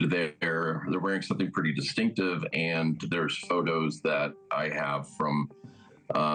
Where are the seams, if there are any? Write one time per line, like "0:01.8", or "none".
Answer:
none